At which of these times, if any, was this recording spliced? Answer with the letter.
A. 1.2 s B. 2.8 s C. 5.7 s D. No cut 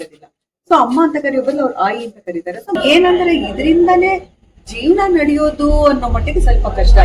B